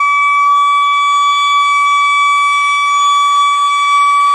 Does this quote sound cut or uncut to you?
uncut